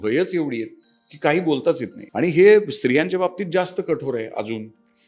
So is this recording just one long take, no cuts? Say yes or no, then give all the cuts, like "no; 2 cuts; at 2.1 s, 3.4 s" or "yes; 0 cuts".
no; 1 cut; at 2.0 s